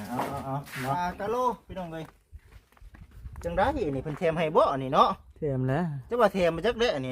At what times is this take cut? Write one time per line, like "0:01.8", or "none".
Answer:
0:01.0

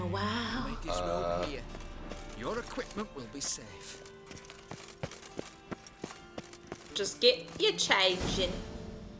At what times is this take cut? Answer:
none

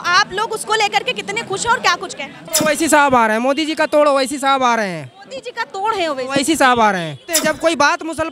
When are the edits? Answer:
0:02.5
0:07.3

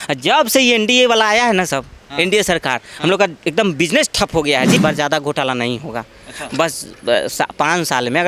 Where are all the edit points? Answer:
0:04.8

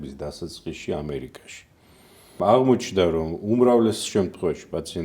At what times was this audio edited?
0:02.4

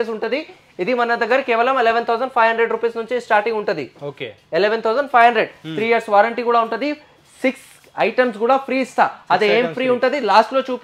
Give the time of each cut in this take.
none

